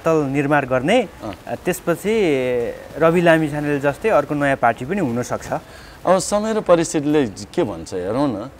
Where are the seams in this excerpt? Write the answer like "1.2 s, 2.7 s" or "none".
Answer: none